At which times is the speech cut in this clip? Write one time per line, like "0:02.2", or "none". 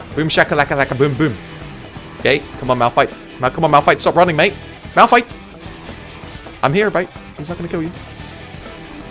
none

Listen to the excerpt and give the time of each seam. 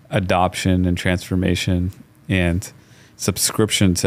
none

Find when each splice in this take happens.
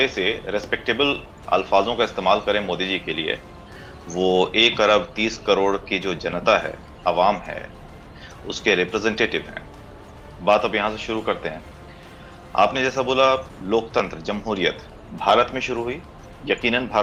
none

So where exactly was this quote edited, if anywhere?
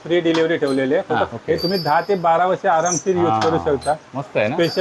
0:01.3

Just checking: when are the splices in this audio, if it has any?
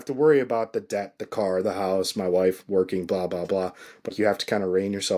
0:04.1

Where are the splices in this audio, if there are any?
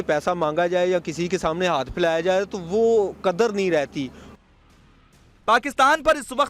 none

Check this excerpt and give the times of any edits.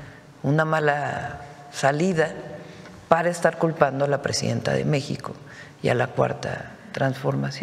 none

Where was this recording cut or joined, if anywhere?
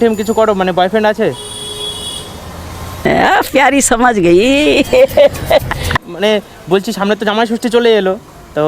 0:06.1

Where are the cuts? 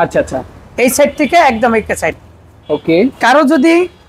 none

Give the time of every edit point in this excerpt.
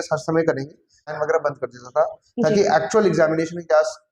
0:01.1

